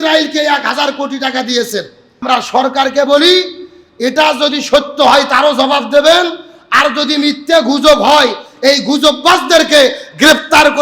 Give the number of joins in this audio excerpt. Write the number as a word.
one